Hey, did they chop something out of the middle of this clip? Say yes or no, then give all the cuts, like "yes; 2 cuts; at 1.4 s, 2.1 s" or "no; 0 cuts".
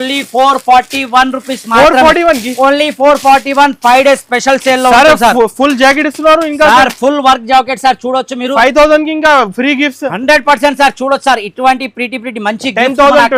no; 0 cuts